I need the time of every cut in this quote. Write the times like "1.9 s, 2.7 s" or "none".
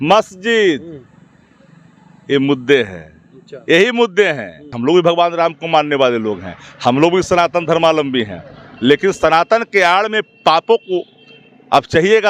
4.8 s